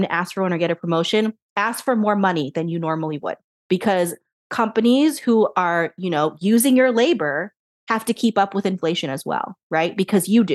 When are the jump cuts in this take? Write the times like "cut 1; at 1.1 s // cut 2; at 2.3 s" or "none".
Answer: cut 1; at 3.5 s